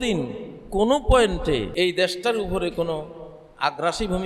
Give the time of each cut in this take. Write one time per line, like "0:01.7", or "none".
0:01.7